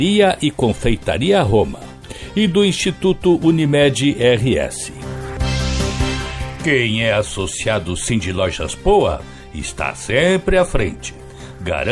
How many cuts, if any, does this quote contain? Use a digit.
2